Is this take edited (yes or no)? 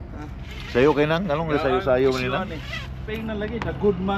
yes